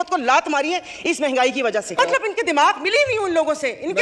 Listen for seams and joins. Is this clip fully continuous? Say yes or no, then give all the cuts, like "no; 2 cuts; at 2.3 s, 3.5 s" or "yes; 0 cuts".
no; 1 cut; at 1.9 s